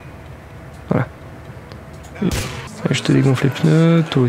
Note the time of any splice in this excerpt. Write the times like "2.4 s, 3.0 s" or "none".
2.7 s